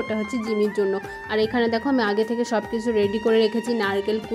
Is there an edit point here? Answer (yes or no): no